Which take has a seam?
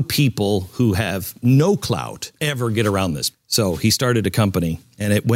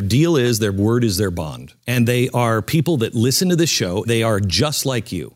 second; 2 cuts; at 1.7 s, 4.1 s

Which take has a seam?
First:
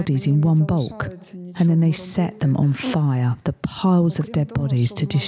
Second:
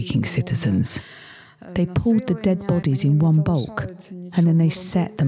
second; 1 cut; at 1.0 s

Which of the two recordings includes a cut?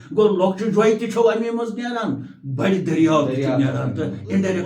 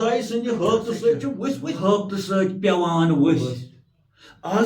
second; 1 cut; at 1.7 s

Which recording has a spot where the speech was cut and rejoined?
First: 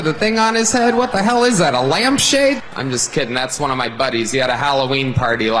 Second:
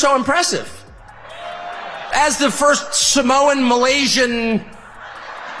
second; 1 cut; at 0.9 s

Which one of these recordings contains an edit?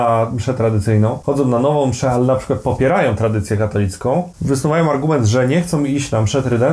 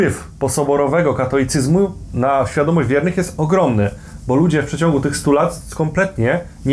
first; 2 cuts; at 1.2 s, 4.3 s

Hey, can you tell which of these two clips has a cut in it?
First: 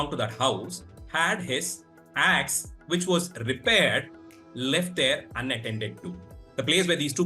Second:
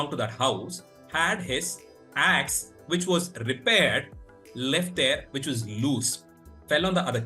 second; 1 cut; at 5.3 s

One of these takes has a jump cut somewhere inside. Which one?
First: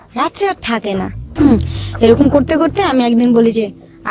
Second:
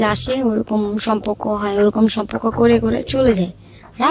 first; 1 cut; at 1.2 s

